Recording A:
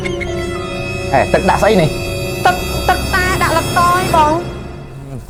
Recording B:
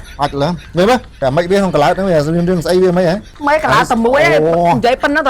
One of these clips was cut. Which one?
B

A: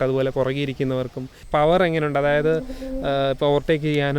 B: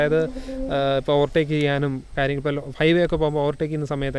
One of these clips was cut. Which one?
A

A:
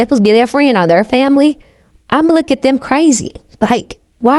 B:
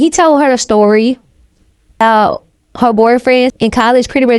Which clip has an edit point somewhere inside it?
B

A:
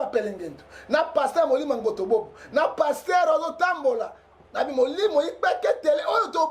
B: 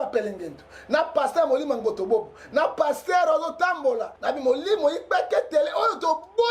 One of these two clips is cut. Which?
B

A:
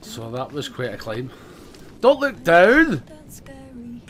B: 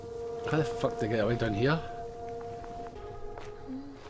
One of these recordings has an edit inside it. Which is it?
B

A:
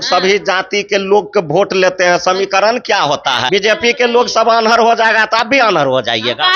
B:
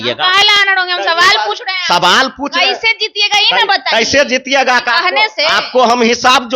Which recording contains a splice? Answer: A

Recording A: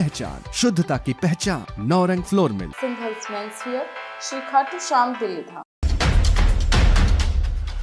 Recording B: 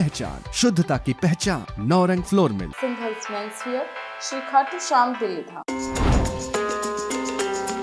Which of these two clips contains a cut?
B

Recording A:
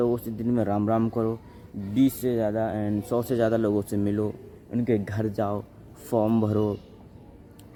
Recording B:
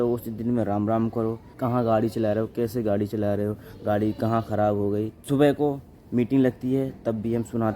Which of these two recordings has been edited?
B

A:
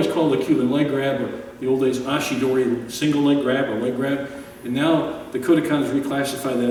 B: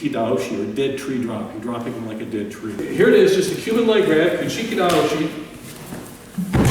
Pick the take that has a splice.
B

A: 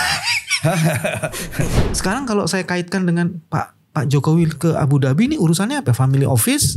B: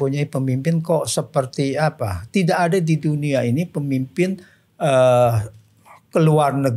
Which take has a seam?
A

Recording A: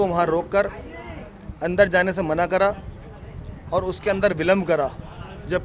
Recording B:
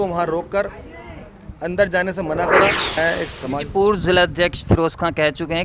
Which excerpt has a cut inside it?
B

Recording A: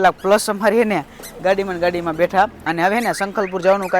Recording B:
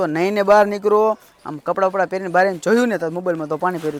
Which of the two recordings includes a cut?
A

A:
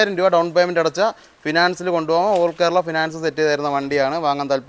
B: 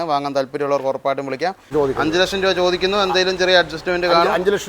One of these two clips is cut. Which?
B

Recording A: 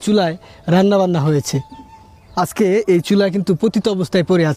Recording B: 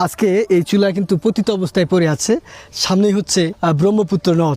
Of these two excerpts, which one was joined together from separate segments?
B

